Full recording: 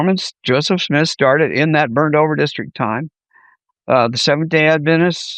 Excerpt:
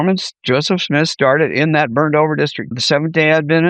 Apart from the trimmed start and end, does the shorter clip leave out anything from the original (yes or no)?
yes